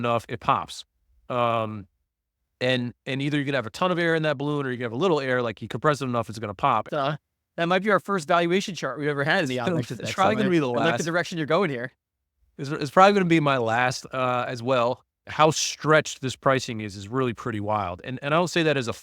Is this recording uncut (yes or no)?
no